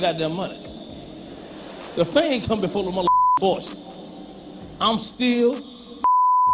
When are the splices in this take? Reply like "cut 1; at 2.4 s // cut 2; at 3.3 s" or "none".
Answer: none